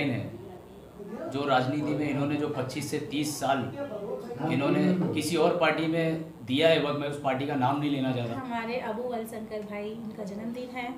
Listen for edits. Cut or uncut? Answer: cut